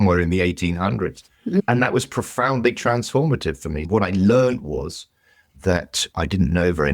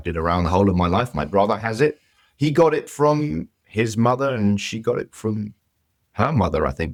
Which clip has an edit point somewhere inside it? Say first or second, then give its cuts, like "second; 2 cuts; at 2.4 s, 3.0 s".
first; 2 cuts; at 1.6 s, 3.7 s